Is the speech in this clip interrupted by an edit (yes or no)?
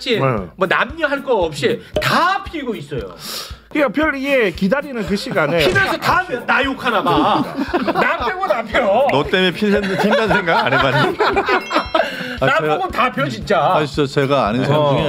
yes